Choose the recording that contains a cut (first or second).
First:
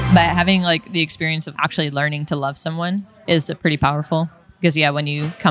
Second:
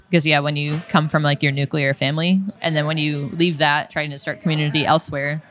second